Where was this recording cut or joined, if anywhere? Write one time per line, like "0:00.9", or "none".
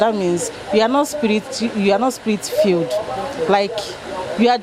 none